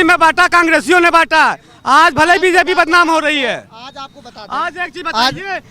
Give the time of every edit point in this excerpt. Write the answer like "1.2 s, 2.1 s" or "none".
none

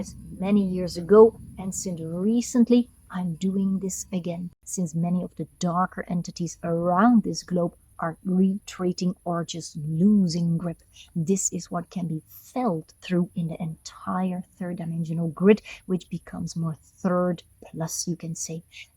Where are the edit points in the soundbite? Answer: 4.6 s

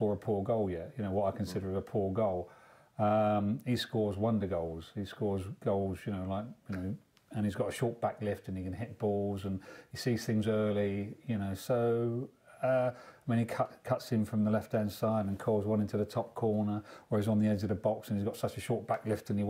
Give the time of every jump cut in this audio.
none

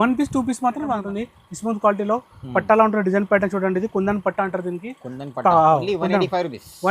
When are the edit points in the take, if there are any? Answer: 1.0 s

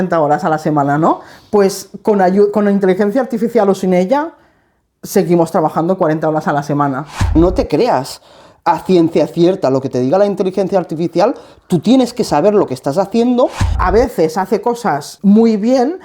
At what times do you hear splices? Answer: 7.3 s, 13.8 s, 15.1 s

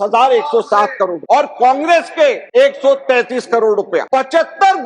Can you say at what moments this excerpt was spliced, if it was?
1.2 s, 2.4 s, 4.1 s

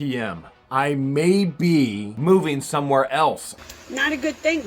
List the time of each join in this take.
2.1 s, 3.5 s

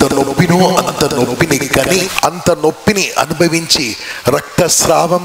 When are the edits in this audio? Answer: 2.1 s

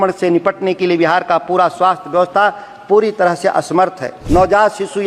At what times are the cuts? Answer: 4.1 s

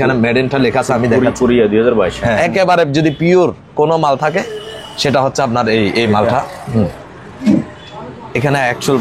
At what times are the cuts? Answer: 2.4 s

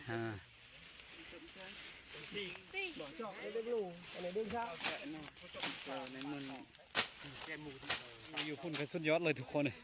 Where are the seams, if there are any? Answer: 3.4 s, 8.5 s

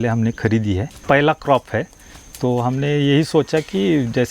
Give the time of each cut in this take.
1.0 s

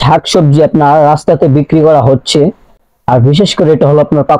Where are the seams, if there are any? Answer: none

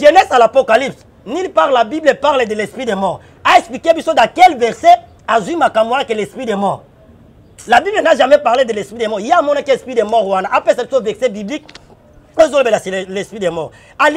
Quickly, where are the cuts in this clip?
none

